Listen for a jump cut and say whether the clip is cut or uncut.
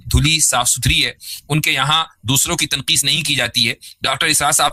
uncut